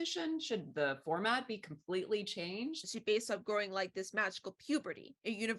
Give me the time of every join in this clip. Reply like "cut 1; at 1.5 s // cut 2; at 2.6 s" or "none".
cut 1; at 2.9 s